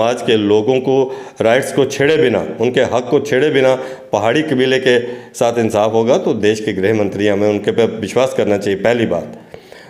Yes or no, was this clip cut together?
no